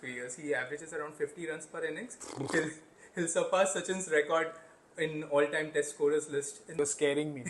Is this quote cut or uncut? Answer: cut